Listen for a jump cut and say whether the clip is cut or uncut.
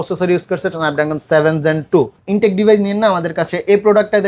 cut